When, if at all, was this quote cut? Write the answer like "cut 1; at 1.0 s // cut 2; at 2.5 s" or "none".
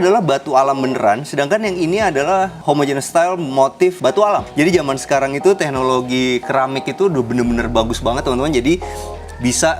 cut 1; at 4.5 s